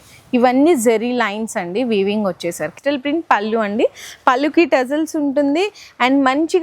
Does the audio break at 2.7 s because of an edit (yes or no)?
yes